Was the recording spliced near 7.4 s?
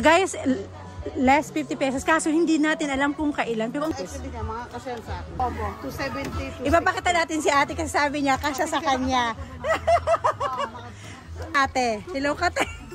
no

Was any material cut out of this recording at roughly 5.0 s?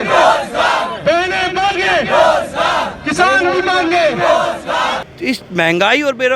yes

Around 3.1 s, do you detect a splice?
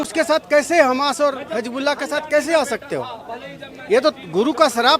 no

